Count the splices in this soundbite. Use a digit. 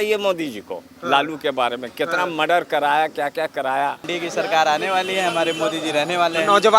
1